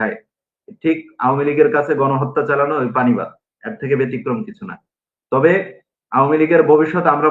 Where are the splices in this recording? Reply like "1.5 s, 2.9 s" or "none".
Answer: none